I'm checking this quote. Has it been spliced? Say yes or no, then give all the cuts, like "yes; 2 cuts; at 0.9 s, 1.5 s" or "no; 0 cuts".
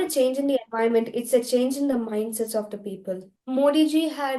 yes; 1 cut; at 3.4 s